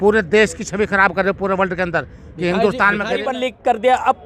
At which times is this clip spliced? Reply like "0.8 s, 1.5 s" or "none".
3.1 s